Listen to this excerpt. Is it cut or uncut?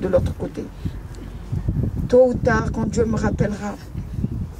uncut